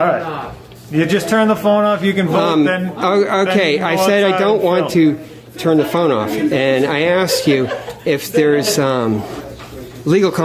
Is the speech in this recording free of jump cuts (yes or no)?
yes